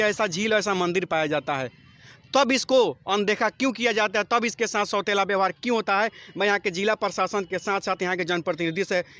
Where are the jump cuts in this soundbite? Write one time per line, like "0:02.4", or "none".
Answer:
none